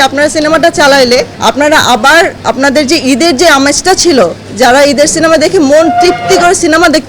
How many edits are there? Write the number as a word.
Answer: two